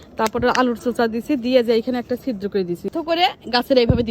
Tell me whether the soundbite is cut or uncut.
cut